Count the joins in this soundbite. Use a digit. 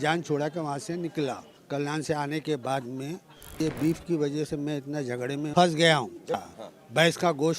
4